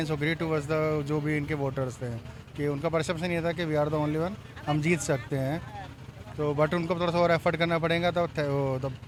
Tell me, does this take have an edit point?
no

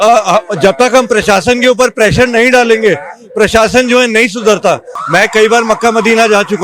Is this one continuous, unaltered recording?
no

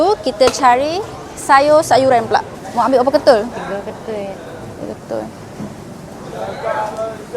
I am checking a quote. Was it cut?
yes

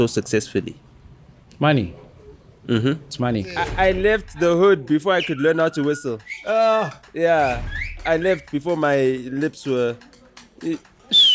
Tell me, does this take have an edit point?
yes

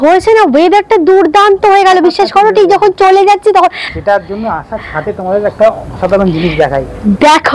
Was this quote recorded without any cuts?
no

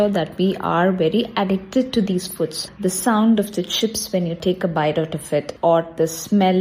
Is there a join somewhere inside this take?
yes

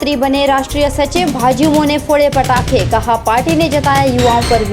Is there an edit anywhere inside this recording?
no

